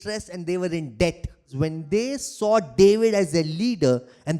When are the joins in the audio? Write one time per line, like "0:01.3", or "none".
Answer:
0:01.5